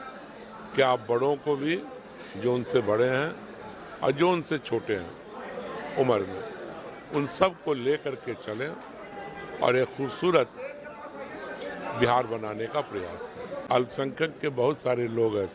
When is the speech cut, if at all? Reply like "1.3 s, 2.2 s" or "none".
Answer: 13.5 s